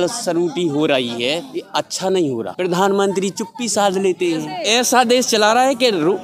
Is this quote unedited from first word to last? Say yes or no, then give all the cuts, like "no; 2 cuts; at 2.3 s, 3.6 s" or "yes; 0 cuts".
no; 3 cuts; at 1.5 s, 2.5 s, 4.6 s